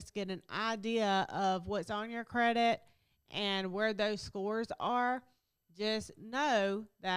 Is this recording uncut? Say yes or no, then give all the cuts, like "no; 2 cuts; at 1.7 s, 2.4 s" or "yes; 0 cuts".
yes; 0 cuts